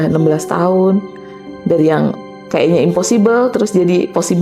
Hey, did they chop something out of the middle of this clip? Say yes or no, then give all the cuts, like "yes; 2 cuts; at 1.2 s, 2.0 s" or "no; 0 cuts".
no; 0 cuts